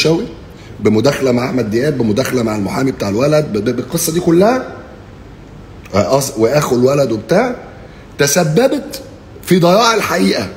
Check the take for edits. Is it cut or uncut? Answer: uncut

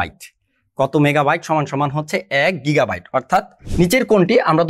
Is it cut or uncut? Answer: cut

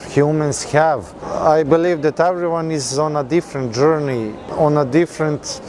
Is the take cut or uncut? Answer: cut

